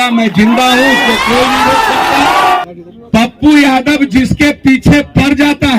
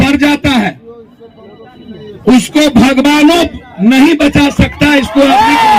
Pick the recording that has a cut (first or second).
first